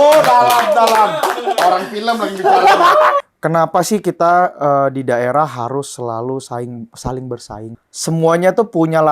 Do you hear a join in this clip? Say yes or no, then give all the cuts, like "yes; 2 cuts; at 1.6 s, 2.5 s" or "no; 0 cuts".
yes; 2 cuts; at 3.2 s, 7.7 s